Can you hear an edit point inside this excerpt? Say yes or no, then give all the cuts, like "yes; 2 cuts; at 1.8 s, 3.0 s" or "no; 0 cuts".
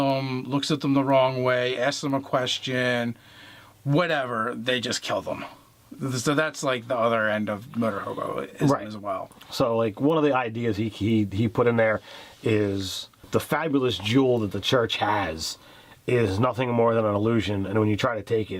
no; 0 cuts